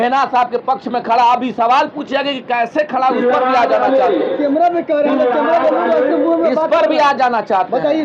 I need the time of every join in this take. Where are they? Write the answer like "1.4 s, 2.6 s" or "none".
none